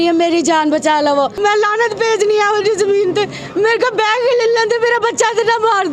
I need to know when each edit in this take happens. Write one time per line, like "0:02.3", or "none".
0:01.1